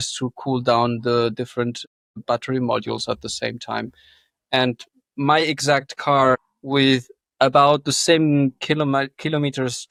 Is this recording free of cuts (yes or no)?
yes